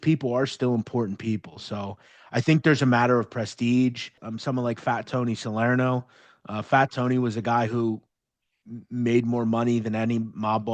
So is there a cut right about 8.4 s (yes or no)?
no